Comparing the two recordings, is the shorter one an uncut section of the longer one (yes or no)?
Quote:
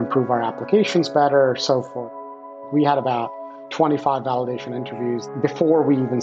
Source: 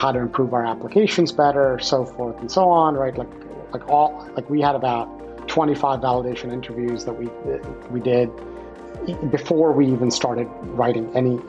no